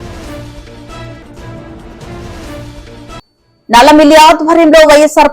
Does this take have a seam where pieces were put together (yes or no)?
yes